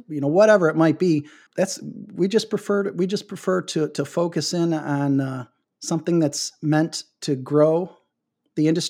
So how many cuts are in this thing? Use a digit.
1